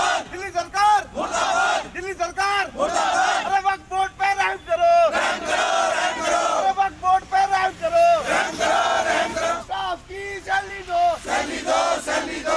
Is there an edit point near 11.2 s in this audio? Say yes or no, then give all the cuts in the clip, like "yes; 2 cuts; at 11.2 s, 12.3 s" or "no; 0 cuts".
no; 1 cut; at 9.5 s